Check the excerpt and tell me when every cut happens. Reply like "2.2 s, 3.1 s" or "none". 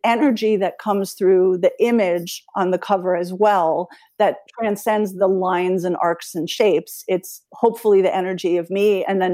none